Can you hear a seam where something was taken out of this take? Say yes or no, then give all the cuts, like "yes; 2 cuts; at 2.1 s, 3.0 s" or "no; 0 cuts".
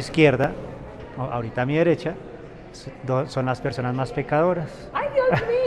no; 0 cuts